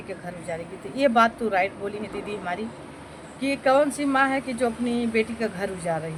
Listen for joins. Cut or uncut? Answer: uncut